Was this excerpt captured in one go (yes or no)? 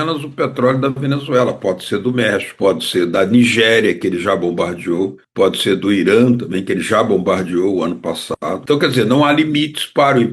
no